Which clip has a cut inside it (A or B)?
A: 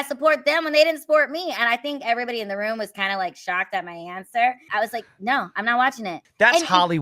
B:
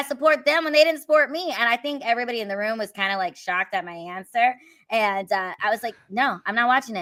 A